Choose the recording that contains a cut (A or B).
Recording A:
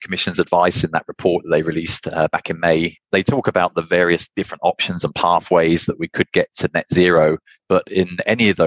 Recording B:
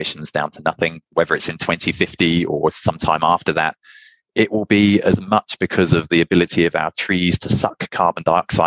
B